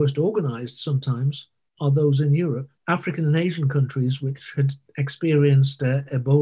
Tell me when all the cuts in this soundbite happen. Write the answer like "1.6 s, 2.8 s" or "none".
2.7 s